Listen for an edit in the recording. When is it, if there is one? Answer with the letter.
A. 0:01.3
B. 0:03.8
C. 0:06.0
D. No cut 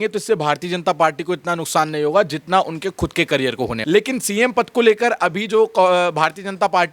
B